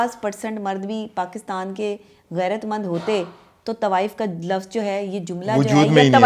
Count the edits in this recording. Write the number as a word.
zero